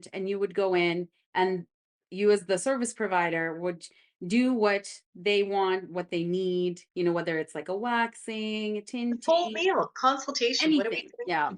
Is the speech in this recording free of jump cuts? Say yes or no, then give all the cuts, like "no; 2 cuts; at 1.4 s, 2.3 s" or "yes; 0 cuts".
no; 1 cut; at 2.0 s